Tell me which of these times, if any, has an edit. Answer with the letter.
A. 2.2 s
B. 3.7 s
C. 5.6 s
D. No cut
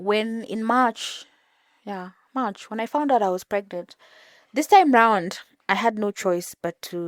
D